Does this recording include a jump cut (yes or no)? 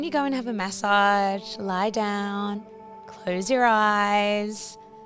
no